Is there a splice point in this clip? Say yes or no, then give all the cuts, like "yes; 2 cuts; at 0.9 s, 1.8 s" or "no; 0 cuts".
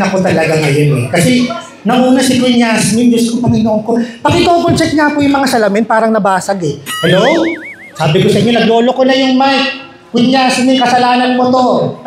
no; 0 cuts